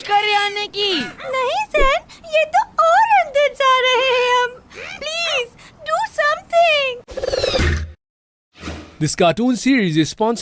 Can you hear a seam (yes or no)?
yes